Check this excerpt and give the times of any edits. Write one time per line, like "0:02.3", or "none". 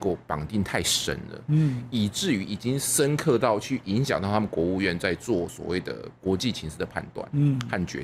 none